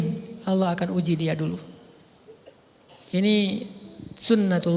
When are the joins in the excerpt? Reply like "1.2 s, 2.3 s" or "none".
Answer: 2.4 s

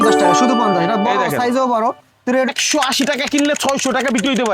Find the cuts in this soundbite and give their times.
2.5 s

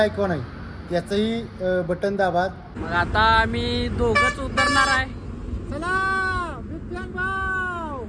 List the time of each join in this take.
2.7 s

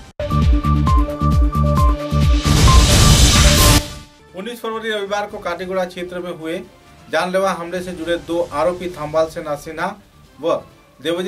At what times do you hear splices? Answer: 3.8 s

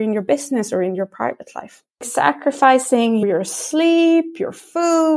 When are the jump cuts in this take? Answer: 2.0 s

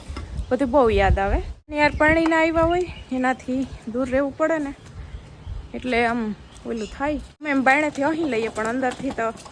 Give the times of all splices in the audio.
1.7 s, 7.5 s

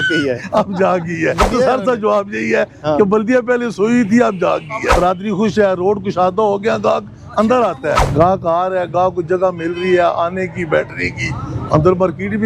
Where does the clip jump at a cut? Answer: 1.4 s, 4.9 s, 8.0 s

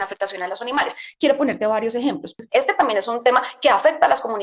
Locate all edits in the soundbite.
2.3 s

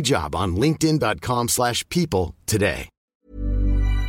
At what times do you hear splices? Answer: 3.2 s

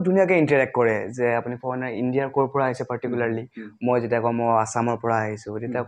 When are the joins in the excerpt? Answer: none

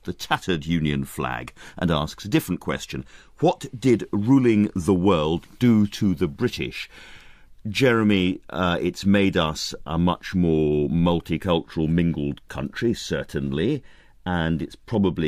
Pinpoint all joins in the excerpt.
9.6 s

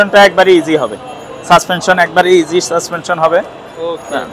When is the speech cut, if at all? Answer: none

